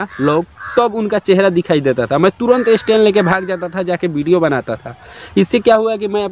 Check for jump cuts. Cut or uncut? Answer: uncut